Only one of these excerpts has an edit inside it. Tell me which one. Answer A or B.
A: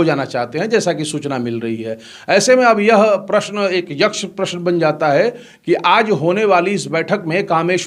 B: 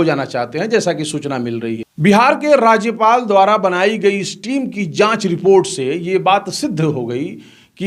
B